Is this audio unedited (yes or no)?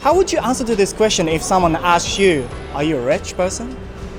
yes